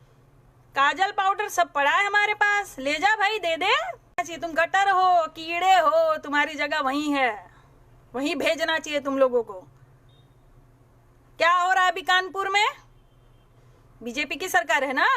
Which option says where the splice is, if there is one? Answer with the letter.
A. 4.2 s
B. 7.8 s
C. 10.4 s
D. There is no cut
A